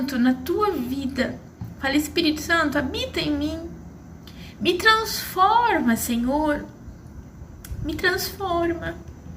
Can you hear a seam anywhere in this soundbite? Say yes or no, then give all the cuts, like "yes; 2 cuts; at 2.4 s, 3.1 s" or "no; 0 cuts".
no; 0 cuts